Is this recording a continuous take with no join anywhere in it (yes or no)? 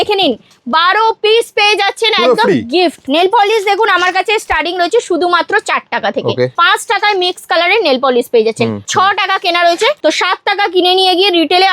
no